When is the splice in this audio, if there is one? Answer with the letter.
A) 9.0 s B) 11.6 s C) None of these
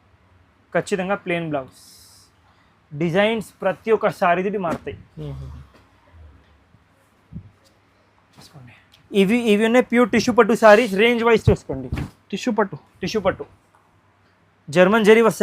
A